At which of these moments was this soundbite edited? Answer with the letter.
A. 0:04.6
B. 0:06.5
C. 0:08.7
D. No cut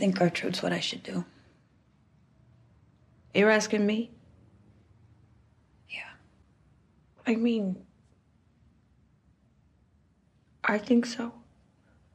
B